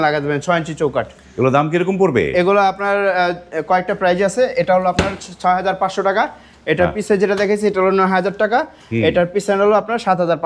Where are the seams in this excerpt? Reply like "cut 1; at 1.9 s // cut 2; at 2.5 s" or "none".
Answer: none